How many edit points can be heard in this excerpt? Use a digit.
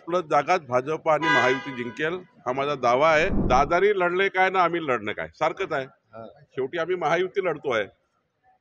1